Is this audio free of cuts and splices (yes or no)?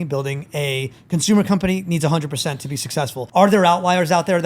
no